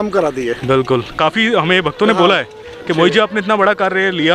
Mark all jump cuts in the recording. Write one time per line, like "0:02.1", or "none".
0:01.1